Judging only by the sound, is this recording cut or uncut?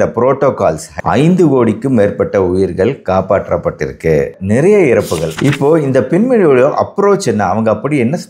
cut